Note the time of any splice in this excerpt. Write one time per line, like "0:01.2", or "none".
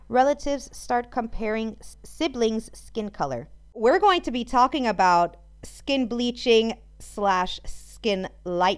0:01.9
0:03.7